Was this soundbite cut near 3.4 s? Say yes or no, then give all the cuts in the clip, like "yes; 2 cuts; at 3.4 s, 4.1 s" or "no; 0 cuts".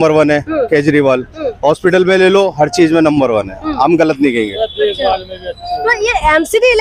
no; 0 cuts